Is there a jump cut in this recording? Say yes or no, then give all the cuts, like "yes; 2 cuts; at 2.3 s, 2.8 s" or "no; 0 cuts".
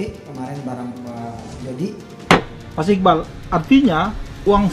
yes; 1 cut; at 2.1 s